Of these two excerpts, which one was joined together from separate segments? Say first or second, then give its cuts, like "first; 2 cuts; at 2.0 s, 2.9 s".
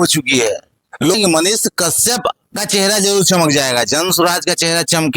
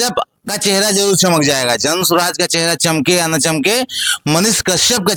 first; 1 cut; at 1.1 s